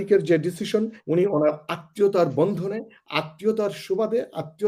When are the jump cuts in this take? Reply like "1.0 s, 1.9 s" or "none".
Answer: 1.0 s